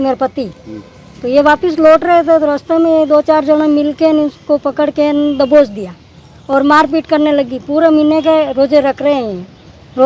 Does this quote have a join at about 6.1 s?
no; 0 cuts

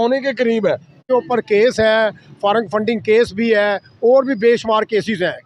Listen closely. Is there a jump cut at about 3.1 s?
no; 1 cut; at 1.0 s

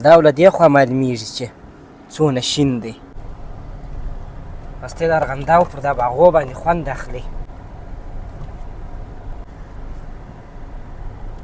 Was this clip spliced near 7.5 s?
yes; 3 cuts; at 3.2 s, 7.5 s, 9.5 s

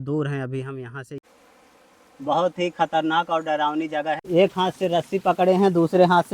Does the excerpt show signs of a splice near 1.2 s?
yes; 2 cuts; at 1.2 s, 4.2 s

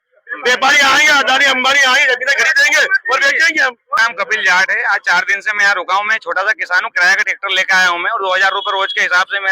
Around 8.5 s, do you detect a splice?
no; 1 cut; at 4.0 s

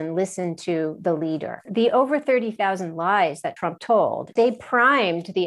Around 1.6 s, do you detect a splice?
yes; 2 cuts; at 1.6 s, 4.2 s

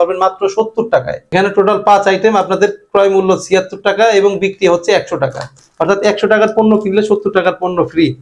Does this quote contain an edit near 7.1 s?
no; 2 cuts; at 1.3 s, 5.6 s

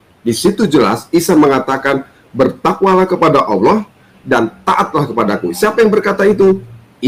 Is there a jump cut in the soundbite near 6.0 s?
no; 0 cuts

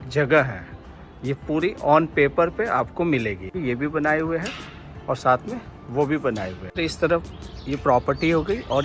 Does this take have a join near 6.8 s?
yes; 2 cuts; at 3.6 s, 6.8 s

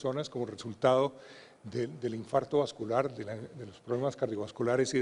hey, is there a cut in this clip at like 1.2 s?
yes; 1 cut; at 1.2 s

